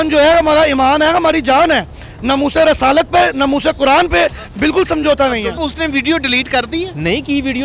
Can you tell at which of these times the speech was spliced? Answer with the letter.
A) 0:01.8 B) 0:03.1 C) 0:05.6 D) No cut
C